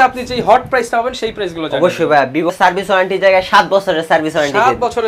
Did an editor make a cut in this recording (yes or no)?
yes